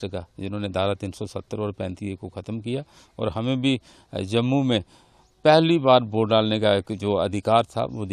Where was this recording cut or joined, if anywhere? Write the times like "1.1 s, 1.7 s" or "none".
none